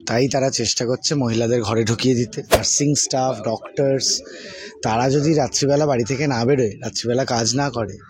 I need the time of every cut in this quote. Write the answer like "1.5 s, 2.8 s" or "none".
2.7 s